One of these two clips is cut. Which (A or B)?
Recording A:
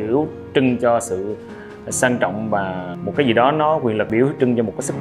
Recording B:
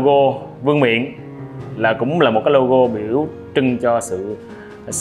A